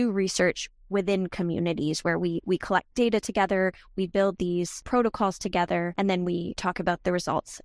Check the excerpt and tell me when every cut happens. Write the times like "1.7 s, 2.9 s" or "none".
4.8 s, 6.3 s